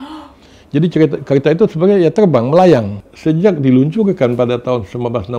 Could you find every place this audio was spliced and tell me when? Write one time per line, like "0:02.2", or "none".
0:03.0